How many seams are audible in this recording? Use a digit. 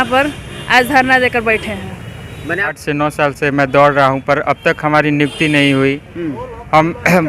1